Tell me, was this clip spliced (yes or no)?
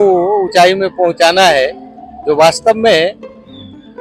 no